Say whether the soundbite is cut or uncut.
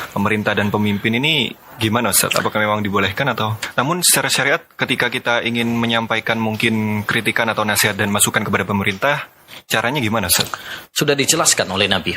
cut